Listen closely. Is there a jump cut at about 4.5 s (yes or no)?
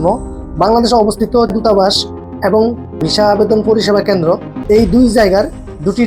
yes